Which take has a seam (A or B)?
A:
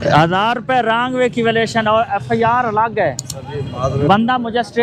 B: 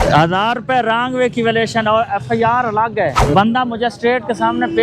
B